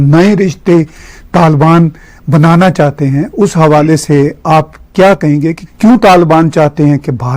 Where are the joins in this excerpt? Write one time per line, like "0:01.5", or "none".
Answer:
0:05.6